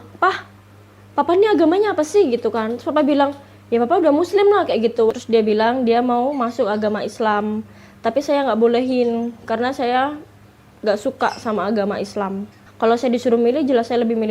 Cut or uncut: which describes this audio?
cut